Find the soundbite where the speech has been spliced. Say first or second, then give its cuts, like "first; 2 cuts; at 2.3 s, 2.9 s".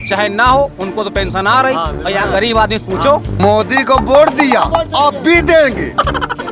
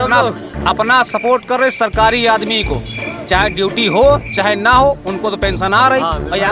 first; 1 cut; at 3.3 s